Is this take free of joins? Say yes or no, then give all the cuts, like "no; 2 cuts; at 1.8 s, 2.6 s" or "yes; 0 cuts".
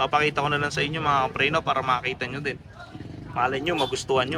yes; 0 cuts